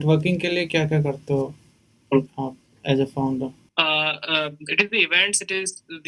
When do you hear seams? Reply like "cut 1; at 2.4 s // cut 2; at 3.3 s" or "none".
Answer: cut 1; at 3.6 s